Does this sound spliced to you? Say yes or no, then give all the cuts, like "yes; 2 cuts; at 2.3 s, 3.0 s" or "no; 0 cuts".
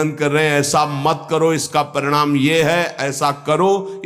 no; 0 cuts